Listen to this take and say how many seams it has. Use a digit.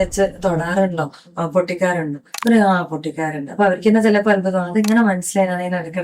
0